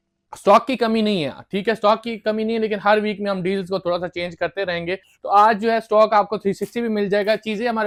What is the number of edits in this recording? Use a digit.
0